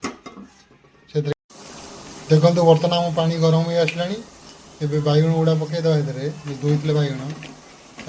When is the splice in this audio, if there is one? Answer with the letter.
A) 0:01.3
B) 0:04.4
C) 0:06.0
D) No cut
A